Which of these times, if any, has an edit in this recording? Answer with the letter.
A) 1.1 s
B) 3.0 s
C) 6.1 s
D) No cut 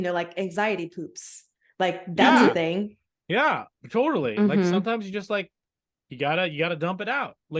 B